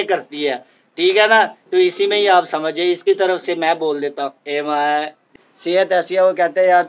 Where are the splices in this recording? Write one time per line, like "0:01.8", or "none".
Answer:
0:05.3